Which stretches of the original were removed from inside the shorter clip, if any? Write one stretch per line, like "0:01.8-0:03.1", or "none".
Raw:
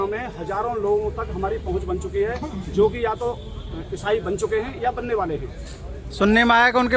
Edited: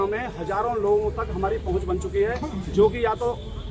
none